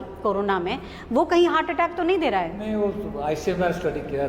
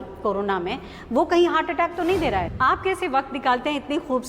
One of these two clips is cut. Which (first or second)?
second